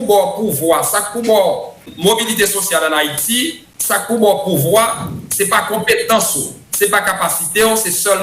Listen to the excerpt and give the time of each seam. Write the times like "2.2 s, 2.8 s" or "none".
1.8 s, 3.7 s